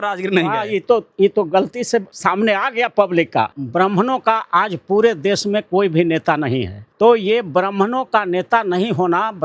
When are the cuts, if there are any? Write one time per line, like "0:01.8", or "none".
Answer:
0:02.1
0:03.6
0:06.8